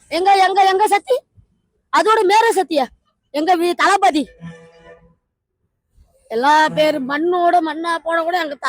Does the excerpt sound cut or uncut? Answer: uncut